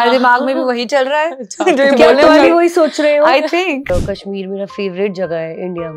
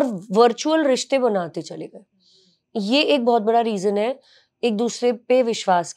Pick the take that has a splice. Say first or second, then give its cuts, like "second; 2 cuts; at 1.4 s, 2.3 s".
first; 1 cut; at 3.9 s